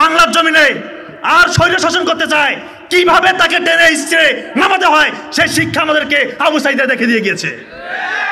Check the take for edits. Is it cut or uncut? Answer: uncut